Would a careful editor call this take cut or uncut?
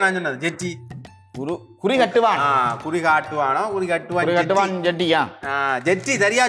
uncut